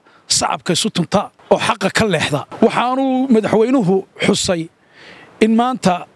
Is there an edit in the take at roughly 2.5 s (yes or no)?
yes